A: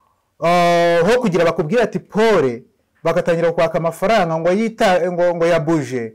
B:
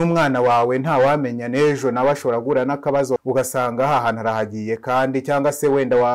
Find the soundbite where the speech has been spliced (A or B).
B